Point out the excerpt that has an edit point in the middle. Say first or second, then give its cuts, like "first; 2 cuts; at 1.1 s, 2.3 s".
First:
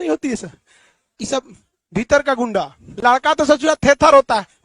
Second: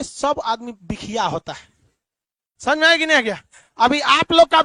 first; 1 cut; at 2.8 s